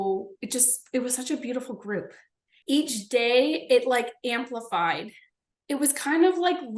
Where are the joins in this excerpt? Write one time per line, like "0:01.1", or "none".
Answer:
0:02.6

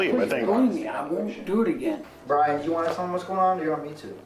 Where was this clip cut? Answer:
0:02.1

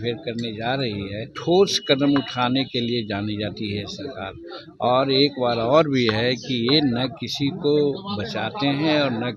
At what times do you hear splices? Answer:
0:01.3

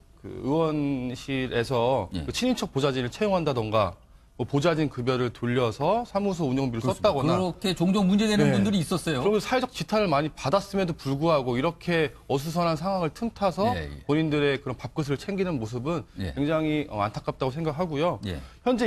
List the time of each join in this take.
0:10.0

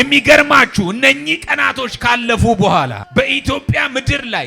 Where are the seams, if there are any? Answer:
0:03.0

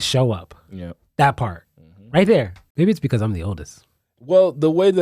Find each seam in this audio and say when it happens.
0:02.6

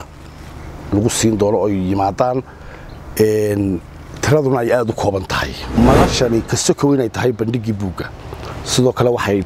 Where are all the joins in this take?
0:05.6

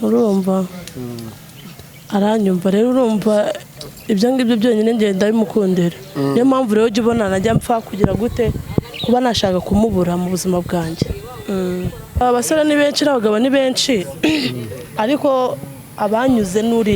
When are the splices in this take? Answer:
0:12.2

